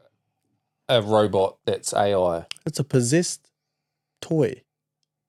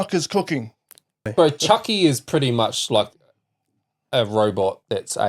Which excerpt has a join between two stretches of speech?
second; 1 cut; at 1.3 s

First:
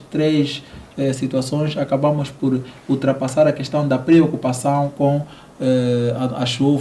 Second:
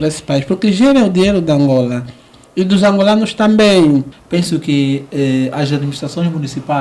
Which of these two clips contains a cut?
second; 1 cut; at 4.2 s

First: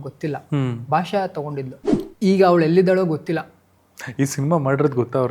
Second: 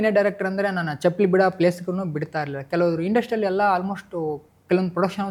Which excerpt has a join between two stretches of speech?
first; 1 cut; at 1.8 s

